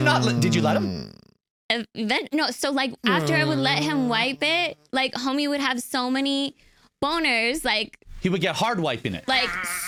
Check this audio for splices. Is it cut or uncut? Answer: uncut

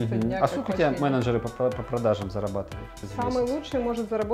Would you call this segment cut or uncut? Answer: cut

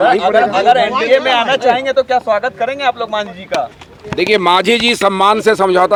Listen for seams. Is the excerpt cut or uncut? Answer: uncut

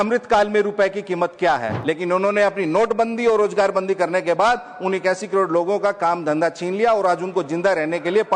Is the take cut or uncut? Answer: cut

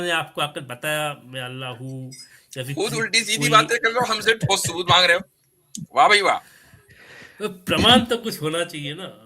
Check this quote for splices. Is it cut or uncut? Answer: uncut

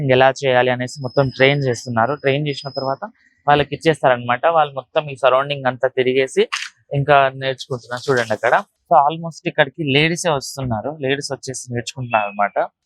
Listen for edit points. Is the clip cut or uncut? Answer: cut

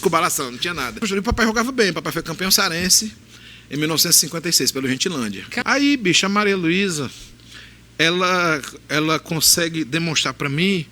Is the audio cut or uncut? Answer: cut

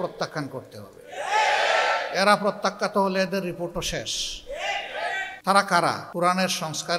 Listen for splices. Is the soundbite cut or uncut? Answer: cut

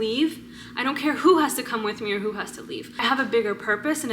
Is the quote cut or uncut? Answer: cut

